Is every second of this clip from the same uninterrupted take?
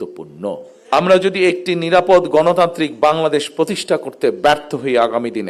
no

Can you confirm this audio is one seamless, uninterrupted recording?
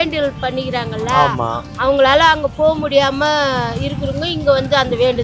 yes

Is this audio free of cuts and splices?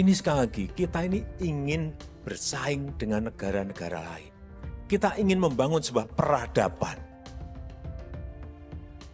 yes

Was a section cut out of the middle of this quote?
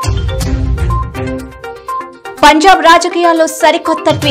yes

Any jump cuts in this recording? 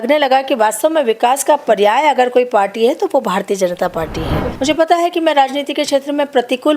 yes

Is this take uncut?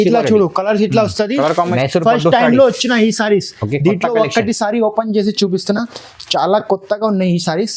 no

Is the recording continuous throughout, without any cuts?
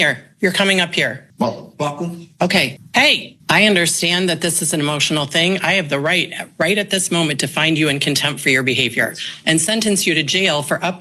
no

